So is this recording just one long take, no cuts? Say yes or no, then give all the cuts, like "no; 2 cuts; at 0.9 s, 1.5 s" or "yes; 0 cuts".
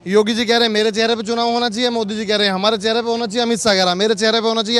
yes; 0 cuts